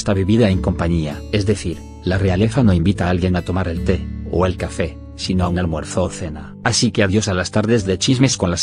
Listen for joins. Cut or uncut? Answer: cut